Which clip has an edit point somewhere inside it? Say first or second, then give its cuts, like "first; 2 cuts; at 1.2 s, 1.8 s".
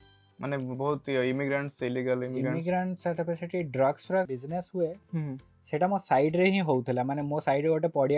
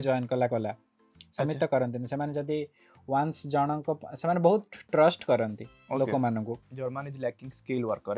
second; 1 cut; at 6.6 s